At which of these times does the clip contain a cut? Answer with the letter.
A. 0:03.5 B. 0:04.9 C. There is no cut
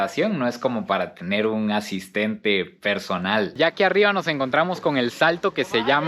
A